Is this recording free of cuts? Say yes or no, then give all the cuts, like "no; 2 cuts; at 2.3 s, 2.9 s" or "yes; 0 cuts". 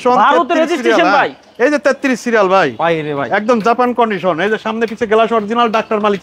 yes; 0 cuts